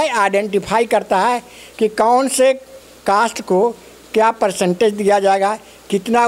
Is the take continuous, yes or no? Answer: yes